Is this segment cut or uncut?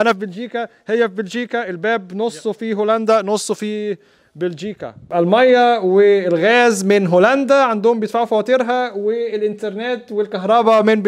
cut